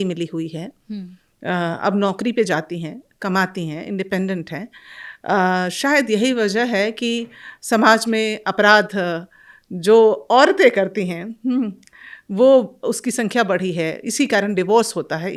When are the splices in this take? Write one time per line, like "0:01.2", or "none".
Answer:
none